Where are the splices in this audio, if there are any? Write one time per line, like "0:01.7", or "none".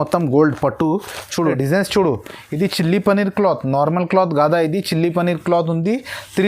0:01.2